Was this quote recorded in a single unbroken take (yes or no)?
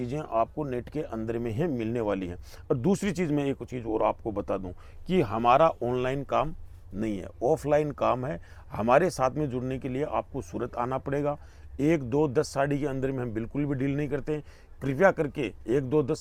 yes